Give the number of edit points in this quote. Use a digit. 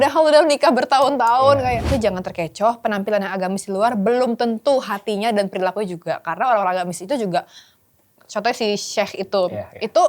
1